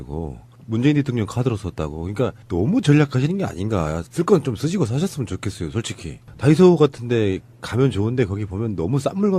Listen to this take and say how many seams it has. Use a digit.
1